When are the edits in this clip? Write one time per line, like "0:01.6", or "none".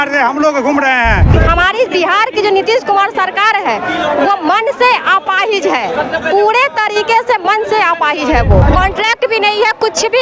0:01.3
0:08.6